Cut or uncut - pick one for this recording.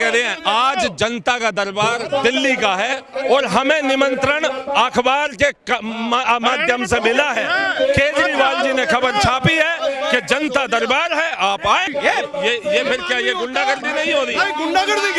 uncut